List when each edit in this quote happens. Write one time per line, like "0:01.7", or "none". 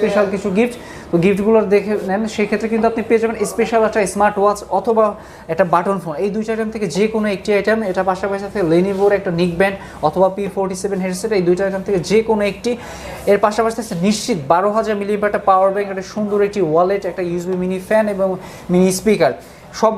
0:02.0